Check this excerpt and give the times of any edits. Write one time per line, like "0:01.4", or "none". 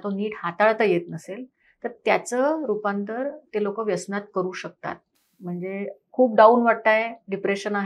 none